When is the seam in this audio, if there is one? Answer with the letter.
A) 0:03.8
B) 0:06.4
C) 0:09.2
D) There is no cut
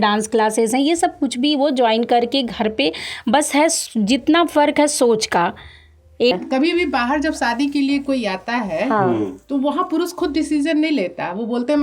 B